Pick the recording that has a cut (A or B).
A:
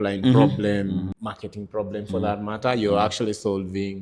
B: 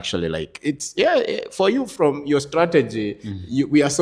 A